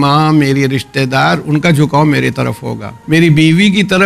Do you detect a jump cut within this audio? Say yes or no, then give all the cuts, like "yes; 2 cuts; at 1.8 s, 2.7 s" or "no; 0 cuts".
yes; 1 cut; at 2.9 s